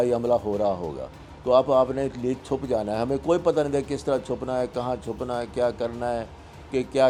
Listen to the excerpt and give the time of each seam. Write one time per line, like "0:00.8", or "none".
none